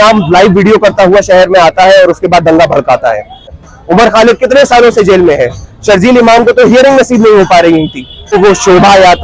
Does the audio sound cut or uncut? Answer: cut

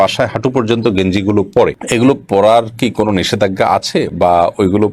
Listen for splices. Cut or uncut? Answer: uncut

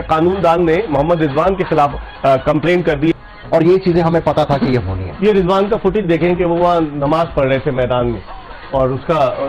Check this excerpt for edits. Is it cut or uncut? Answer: uncut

